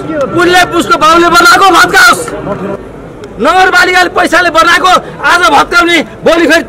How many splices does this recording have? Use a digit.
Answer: 1